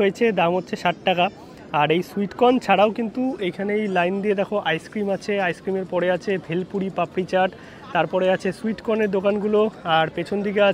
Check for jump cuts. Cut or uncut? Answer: uncut